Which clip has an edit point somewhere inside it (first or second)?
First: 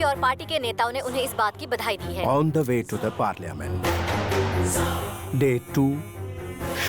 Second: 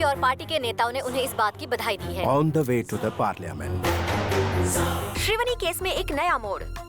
second